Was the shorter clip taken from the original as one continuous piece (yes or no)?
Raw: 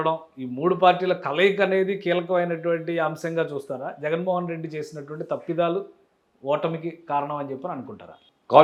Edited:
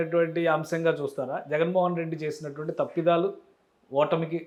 yes